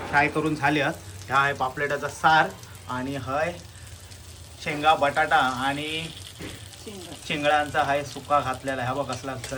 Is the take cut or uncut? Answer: uncut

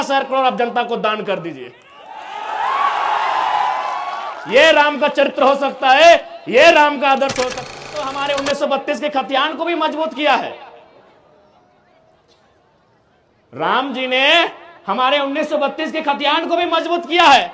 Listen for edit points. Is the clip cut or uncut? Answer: cut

